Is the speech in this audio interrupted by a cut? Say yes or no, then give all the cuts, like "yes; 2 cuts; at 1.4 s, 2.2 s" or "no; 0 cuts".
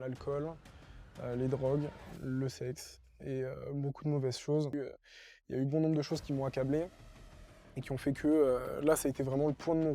yes; 1 cut; at 4.7 s